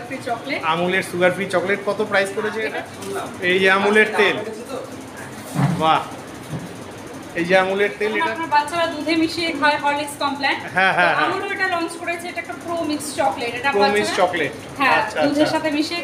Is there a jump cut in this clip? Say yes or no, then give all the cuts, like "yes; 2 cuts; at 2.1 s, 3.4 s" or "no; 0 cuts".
yes; 2 cuts; at 2.7 s, 8.1 s